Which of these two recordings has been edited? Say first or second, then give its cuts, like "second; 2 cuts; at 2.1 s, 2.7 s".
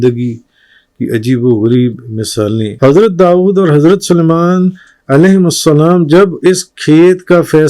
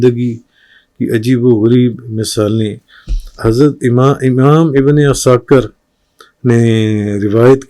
first; 1 cut; at 2.7 s